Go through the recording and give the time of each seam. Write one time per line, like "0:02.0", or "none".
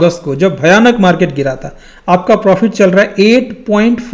none